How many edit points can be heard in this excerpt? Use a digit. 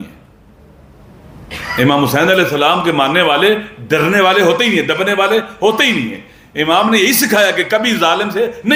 0